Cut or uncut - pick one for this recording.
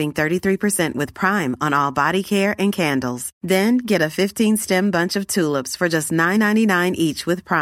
uncut